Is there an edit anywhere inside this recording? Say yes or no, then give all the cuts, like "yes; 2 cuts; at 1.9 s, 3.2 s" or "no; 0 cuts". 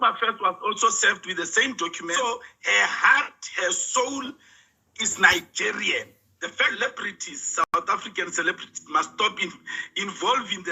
yes; 2 cuts; at 2.1 s, 6.7 s